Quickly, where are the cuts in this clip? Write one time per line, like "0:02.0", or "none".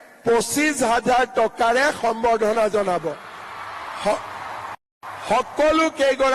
none